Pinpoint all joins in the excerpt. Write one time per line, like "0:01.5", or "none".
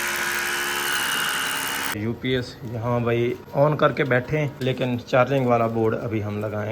0:01.9
0:03.4
0:04.5